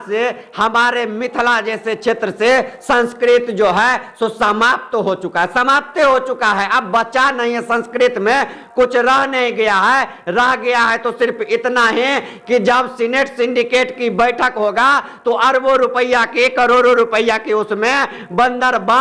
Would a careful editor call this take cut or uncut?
uncut